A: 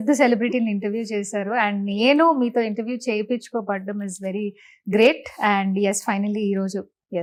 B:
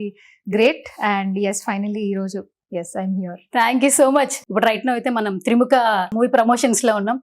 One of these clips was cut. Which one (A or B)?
B